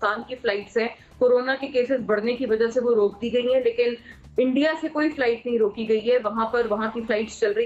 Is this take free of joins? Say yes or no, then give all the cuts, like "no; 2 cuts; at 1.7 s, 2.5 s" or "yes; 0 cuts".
yes; 0 cuts